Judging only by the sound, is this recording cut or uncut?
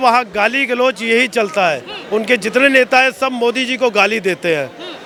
uncut